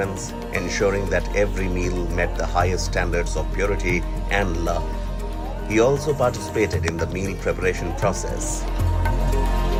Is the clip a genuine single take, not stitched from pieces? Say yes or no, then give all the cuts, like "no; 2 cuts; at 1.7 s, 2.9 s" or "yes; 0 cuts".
yes; 0 cuts